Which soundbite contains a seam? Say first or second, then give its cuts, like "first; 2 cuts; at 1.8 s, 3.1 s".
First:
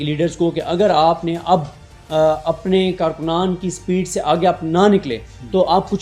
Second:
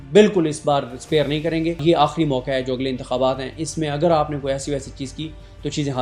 second; 1 cut; at 1.8 s